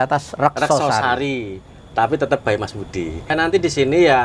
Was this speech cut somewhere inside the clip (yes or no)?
yes